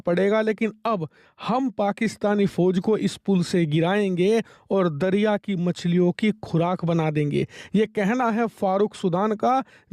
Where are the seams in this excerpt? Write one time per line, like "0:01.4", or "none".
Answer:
none